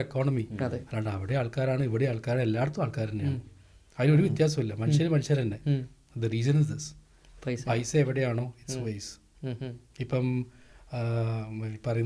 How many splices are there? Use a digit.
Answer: 0